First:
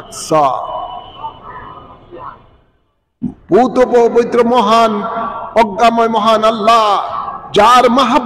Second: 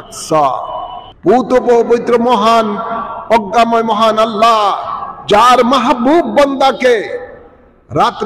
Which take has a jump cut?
second; 1 cut; at 1.1 s

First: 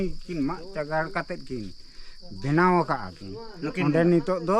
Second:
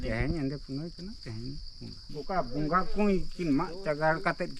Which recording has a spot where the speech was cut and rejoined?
second; 1 cut; at 2.1 s

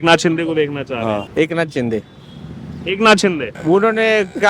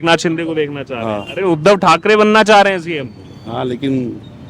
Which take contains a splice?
first; 2 cuts; at 1.2 s, 3.5 s

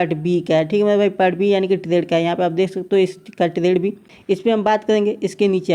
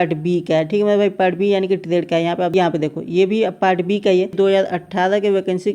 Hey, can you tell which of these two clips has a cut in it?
second; 2 cuts; at 2.5 s, 4.3 s

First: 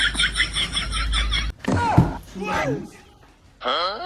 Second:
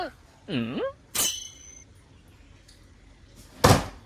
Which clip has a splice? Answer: first; 1 cut; at 1.5 s

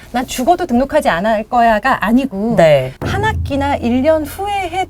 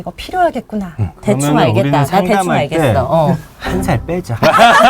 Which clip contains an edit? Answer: second; 1 cut; at 1.1 s

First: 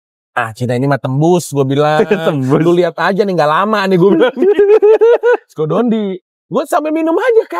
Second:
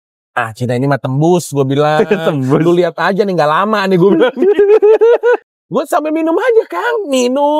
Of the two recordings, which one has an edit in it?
second; 1 cut; at 5.5 s

